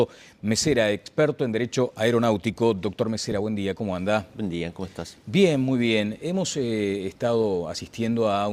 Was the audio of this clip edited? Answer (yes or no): yes